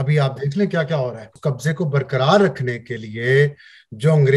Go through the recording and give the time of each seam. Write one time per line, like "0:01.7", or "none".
0:01.3